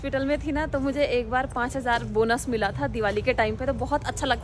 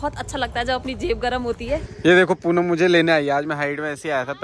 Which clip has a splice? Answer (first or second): second